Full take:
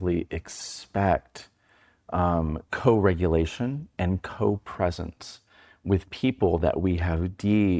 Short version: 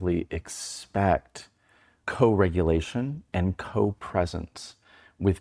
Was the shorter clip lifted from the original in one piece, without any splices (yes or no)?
no